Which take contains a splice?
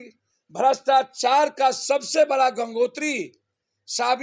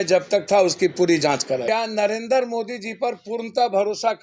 second; 1 cut; at 1.7 s

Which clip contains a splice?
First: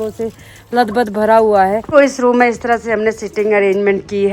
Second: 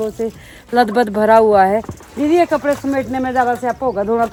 first; 1 cut; at 1.9 s

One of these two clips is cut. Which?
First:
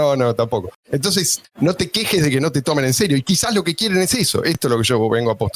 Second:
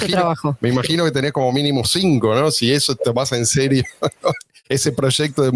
first; 2 cuts; at 1.0 s, 4.6 s

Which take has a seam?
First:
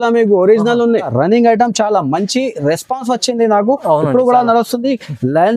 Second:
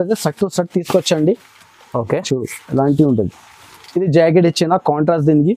first; 1 cut; at 1.1 s

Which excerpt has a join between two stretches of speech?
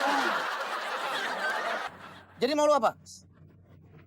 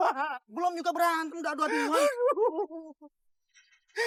first; 1 cut; at 1.9 s

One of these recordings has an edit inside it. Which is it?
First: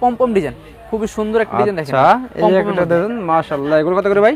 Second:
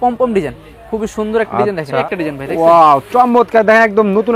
second; 1 cut; at 2.0 s

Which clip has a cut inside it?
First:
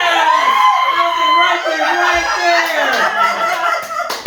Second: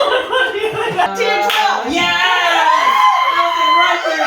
second; 1 cut; at 1.1 s

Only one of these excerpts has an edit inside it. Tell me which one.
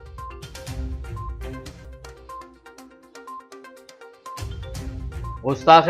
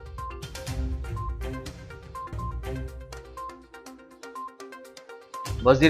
first; 1 cut; at 1.5 s

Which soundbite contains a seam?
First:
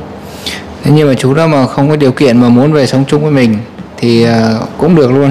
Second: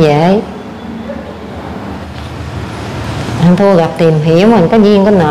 second; 1 cut; at 2.0 s

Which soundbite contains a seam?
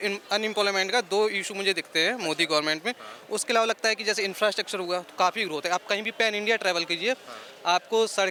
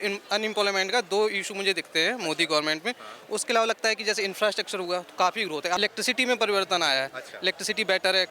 second; 1 cut; at 5.8 s

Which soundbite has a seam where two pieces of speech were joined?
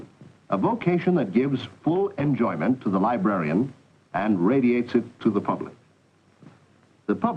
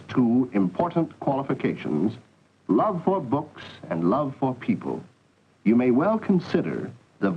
second; 1 cut; at 5.6 s

